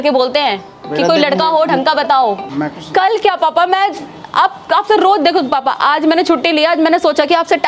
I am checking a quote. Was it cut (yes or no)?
yes